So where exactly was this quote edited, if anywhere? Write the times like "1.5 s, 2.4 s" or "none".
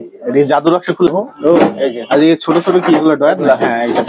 1.1 s

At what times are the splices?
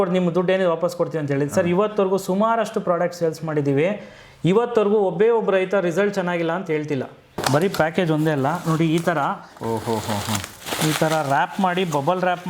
7.4 s

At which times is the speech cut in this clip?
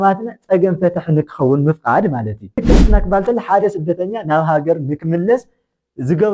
2.6 s

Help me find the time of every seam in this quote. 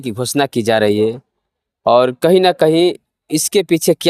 none

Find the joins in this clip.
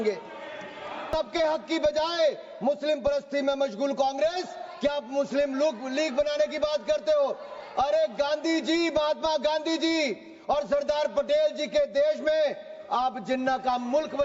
1.1 s

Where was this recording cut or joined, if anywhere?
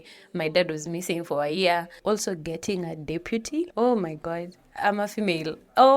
1.9 s

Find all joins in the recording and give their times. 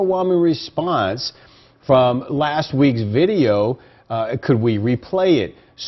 none

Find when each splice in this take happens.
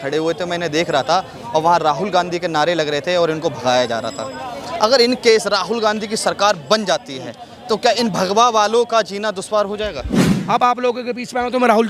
10.2 s

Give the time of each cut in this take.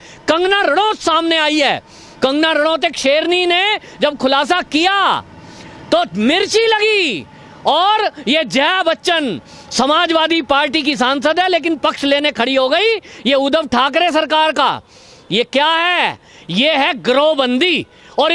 none

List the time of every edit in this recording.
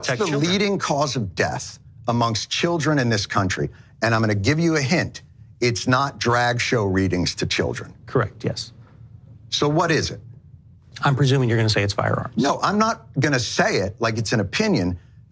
none

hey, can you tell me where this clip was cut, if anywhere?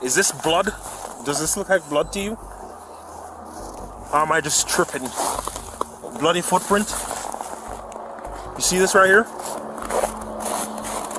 none

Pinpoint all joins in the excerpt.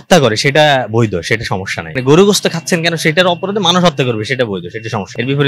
none

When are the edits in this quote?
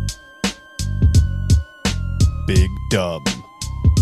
none

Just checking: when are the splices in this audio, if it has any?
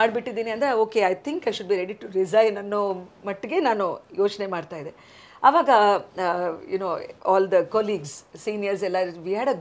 none

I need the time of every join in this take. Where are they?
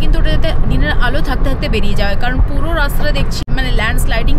3.4 s

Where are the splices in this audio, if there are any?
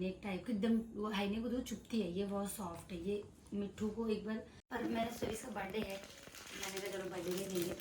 4.6 s

